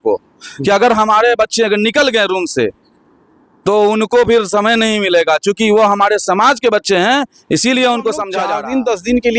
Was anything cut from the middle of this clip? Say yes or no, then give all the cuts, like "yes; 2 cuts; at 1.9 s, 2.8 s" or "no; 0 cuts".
yes; 1 cut; at 8.3 s